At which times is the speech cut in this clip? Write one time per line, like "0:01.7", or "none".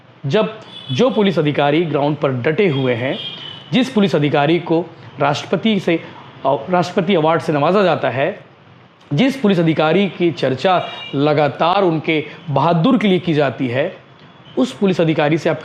none